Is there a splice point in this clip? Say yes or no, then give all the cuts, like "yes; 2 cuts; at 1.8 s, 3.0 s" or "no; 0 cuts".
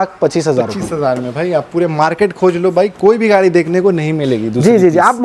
no; 0 cuts